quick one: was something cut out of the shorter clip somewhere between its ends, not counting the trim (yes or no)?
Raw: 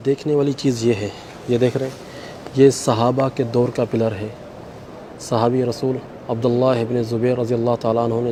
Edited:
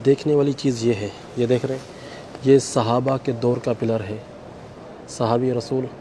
yes